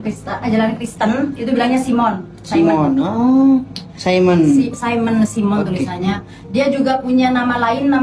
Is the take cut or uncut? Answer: uncut